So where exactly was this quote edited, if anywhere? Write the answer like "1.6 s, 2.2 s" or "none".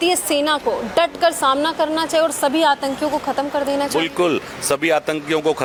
none